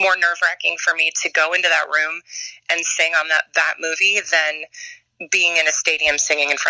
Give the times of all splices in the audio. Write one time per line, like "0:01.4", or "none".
none